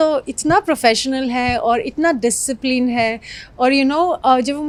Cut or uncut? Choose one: uncut